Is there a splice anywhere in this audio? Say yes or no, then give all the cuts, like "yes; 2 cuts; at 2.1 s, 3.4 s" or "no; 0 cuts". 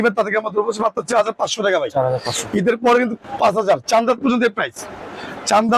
no; 0 cuts